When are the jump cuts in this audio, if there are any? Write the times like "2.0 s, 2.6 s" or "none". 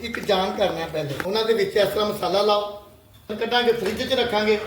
1.2 s, 3.3 s